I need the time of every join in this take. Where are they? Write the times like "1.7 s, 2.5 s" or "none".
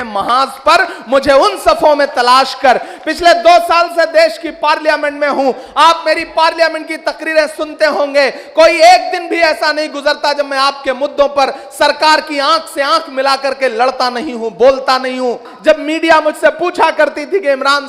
15.5 s